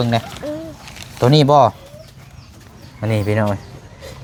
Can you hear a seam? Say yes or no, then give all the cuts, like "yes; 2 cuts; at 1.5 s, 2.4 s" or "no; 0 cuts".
no; 0 cuts